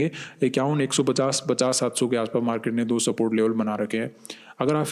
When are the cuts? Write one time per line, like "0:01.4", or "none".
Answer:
none